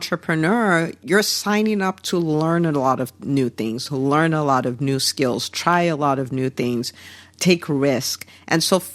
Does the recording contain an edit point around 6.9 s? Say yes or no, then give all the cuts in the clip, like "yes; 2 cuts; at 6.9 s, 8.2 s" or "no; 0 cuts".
no; 1 cut; at 1.0 s